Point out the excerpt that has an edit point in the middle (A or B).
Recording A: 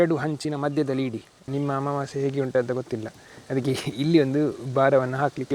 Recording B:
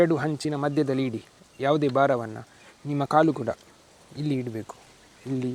A